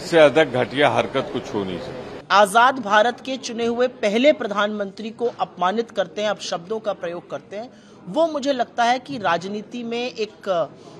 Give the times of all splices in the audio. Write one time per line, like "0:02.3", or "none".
0:02.1